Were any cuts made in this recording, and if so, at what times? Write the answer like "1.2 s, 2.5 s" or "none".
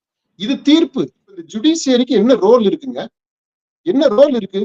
1.5 s